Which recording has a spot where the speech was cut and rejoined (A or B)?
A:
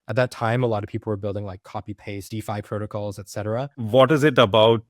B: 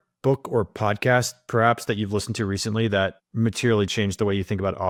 A